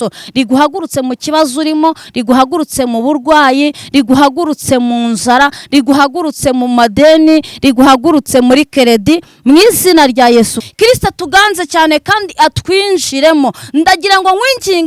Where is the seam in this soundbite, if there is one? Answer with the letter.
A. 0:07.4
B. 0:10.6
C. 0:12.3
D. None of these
B